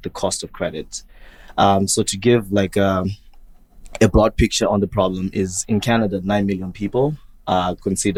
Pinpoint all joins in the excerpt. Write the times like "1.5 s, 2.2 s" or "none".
none